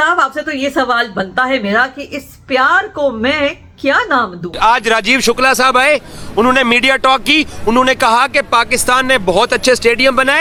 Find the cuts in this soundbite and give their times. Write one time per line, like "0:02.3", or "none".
none